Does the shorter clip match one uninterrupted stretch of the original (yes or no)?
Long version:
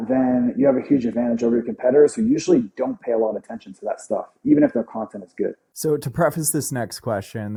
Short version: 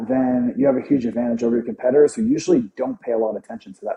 yes